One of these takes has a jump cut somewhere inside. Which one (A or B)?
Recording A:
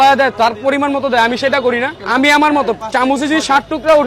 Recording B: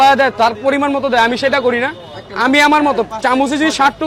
A